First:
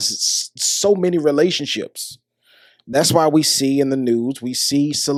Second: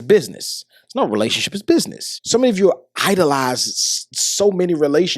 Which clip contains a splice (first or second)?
second